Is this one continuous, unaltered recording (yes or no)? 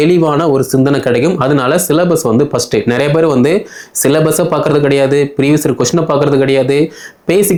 yes